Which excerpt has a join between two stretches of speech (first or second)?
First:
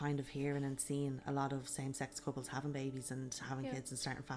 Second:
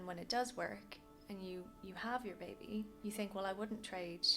second